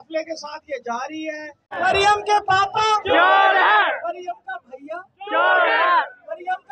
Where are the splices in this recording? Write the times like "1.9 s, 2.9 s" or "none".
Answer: 1.7 s